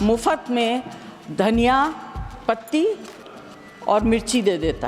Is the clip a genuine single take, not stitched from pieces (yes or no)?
yes